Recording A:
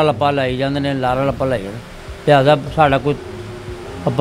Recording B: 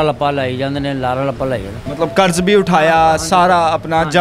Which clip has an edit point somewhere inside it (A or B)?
B